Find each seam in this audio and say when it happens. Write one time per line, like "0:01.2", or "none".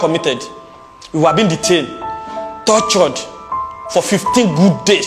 none